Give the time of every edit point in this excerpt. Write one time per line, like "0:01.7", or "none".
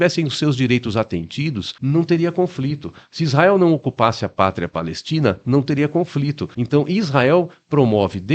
0:01.7
0:06.5